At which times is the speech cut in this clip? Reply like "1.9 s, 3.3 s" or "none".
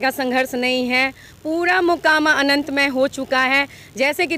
none